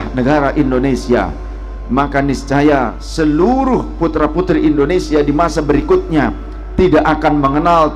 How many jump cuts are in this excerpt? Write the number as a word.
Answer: one